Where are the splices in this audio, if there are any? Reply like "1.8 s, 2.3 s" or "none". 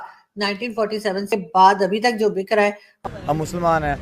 1.3 s, 3.0 s